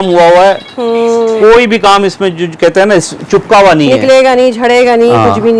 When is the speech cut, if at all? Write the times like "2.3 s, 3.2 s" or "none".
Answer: none